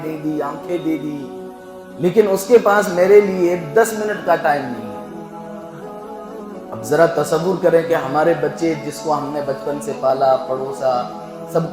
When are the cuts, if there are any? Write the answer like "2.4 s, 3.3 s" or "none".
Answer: 4.8 s, 6.9 s